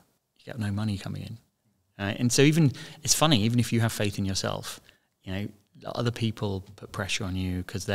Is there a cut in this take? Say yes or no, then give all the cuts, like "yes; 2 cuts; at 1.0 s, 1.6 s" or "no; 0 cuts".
no; 0 cuts